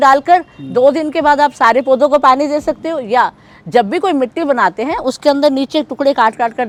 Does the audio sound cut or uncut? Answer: uncut